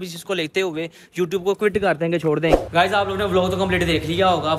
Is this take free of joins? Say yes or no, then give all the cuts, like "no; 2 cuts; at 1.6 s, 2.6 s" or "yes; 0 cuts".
no; 1 cut; at 2.6 s